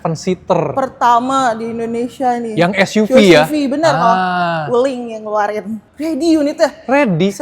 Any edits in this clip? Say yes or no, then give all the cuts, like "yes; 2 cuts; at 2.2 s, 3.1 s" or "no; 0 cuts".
yes; 1 cut; at 5.8 s